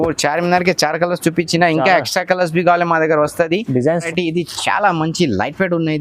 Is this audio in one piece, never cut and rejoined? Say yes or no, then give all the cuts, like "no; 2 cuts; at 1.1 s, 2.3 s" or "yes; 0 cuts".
no; 1 cut; at 4.1 s